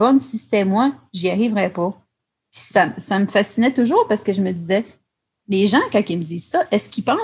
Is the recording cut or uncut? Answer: uncut